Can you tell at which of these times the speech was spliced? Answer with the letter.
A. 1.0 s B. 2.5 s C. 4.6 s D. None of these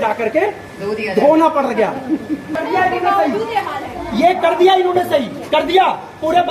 B